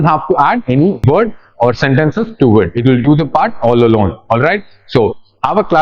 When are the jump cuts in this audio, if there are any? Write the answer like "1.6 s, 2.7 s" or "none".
1.0 s